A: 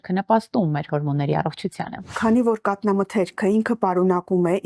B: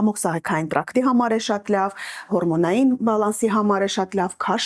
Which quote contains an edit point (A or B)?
A